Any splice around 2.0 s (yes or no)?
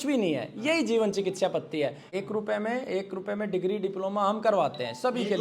yes